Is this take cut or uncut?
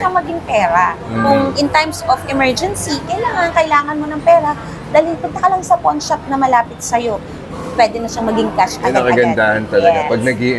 uncut